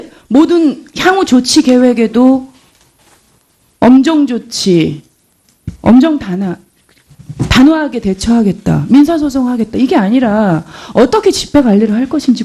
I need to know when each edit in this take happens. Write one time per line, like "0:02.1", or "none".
none

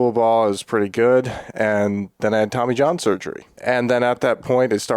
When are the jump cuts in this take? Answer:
0:03.6

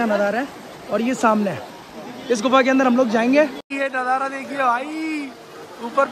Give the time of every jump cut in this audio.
0:03.6

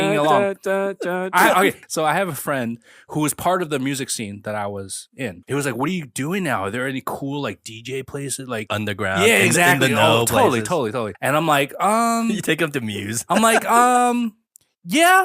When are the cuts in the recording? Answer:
0:01.8
0:02.9
0:05.4
0:08.7
0:11.1

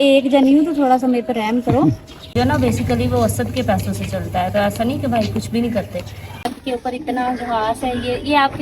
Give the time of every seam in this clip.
0:02.3
0:06.5

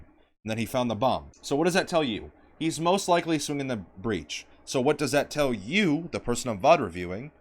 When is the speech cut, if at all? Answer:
0:01.3

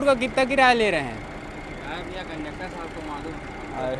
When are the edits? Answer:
none

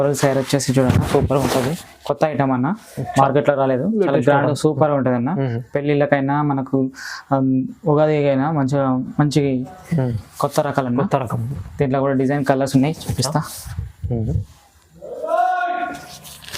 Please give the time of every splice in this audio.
none

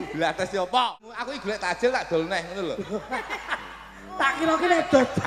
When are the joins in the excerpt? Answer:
0:01.1

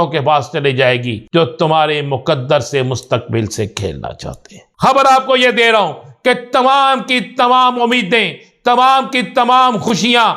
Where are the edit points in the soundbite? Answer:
0:01.1
0:04.6

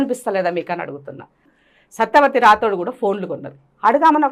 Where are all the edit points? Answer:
0:01.4

